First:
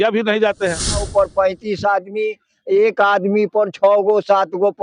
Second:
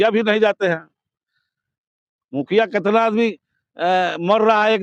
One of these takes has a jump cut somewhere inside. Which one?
first; 1 cut; at 1.1 s

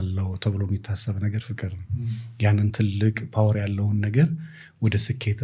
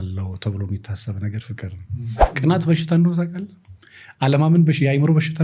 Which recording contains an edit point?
second; 1 cut; at 2.2 s

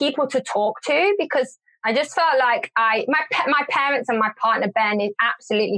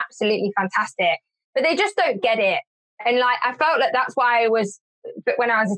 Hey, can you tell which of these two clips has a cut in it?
first; 1 cut; at 1.8 s

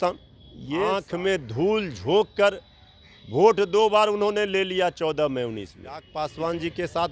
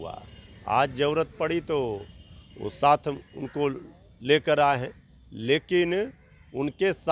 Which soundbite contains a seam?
first; 2 cuts; at 0.9 s, 6.1 s

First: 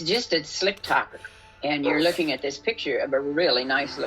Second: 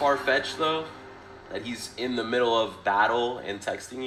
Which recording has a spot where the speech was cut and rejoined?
first; 1 cut; at 1.6 s

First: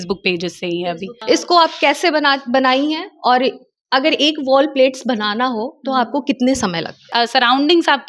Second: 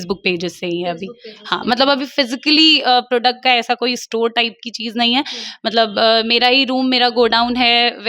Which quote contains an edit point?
first; 2 cuts; at 1.1 s, 7.1 s

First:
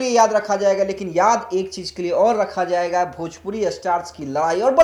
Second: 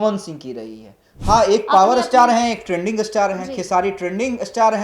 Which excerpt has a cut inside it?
second; 1 cut; at 1.1 s

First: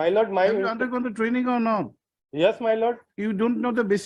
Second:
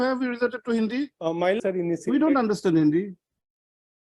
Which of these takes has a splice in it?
second; 1 cut; at 1.6 s

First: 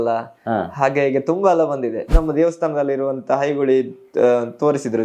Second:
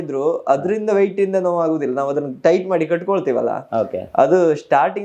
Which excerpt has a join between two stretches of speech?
first; 1 cut; at 2.2 s

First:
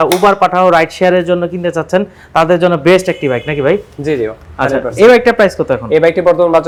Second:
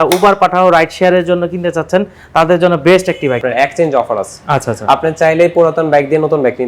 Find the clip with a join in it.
second; 1 cut; at 3.4 s

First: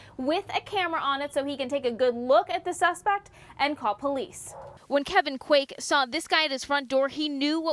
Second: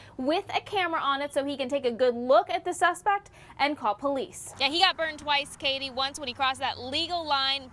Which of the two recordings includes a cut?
second; 1 cut; at 4.4 s

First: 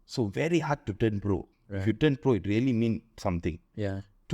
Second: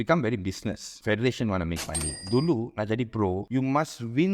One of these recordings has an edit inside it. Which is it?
second; 3 cuts; at 0.9 s, 2.1 s, 3.4 s

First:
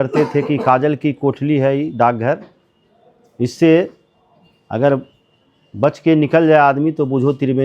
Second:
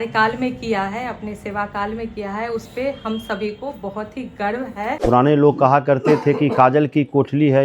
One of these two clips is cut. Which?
second; 1 cut; at 5.0 s

